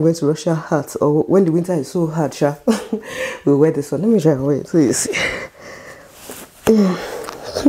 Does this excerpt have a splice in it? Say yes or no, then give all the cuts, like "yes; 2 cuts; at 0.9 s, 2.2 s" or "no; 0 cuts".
no; 0 cuts